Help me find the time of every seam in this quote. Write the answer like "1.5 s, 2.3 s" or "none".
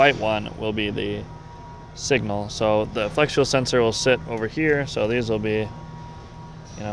none